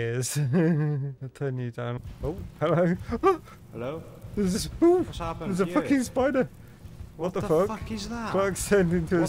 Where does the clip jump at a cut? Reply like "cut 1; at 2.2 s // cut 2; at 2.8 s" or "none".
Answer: cut 1; at 2.0 s